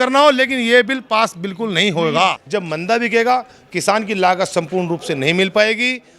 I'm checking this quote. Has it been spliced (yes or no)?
yes